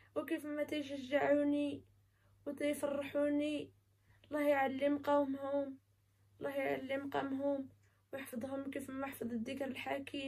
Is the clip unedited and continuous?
yes; 0 cuts

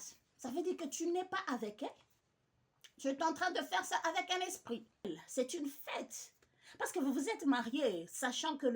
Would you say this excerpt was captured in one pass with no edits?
no; 1 cut; at 5.0 s

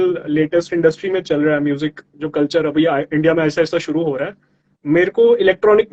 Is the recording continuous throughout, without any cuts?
yes; 0 cuts

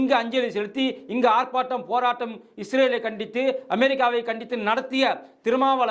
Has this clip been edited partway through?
no; 0 cuts

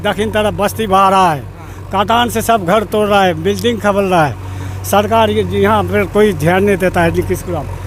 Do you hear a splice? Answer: no; 0 cuts

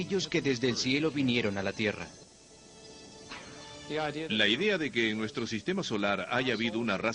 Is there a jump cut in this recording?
yes; 1 cut; at 5.5 s

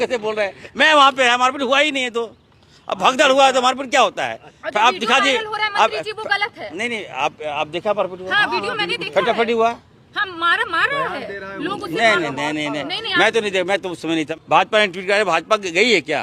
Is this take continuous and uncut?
no; 1 cut; at 14.3 s

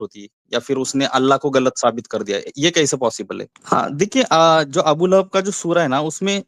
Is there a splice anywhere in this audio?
yes; 1 cut; at 3.5 s

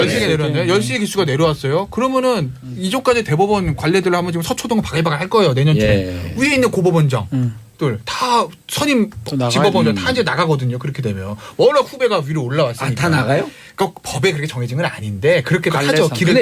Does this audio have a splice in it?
yes; 1 cut; at 8.5 s

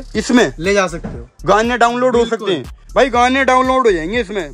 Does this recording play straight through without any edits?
yes; 0 cuts

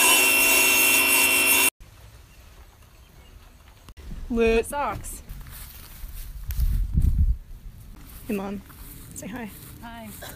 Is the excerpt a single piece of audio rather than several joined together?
yes; 0 cuts

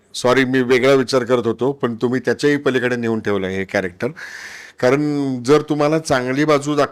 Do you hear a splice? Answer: no; 0 cuts

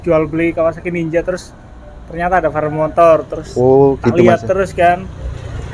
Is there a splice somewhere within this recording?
no; 0 cuts

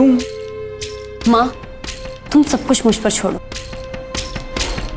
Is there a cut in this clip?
yes; 1 cut; at 3.5 s

